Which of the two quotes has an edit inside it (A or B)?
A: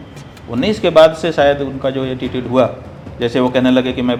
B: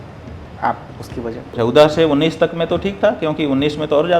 B